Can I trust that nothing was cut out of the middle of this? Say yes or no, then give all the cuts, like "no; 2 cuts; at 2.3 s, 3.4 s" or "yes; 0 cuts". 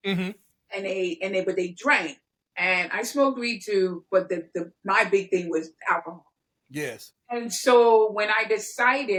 yes; 0 cuts